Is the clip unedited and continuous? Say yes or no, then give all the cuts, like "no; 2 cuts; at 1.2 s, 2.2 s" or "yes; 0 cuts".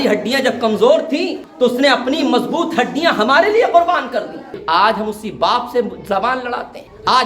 no; 2 cuts; at 1.4 s, 4.6 s